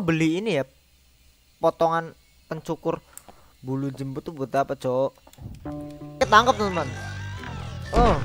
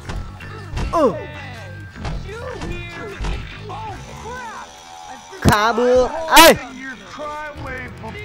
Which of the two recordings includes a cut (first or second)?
first